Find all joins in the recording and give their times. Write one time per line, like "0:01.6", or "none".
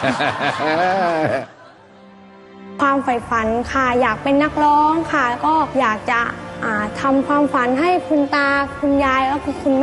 none